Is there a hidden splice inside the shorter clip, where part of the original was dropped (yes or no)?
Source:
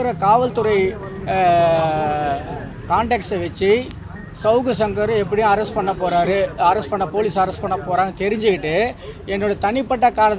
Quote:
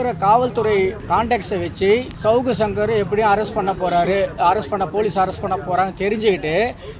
yes